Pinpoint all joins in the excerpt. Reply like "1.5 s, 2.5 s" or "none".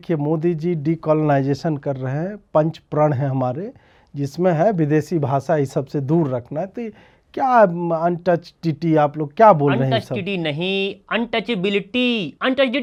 none